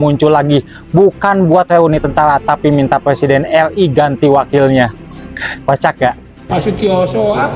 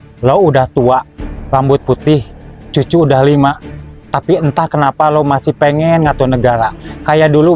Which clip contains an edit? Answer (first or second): first